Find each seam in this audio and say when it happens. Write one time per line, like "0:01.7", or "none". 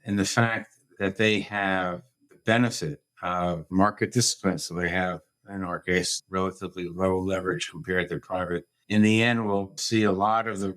0:09.8